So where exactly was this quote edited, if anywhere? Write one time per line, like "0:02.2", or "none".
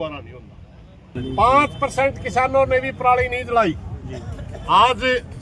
0:01.2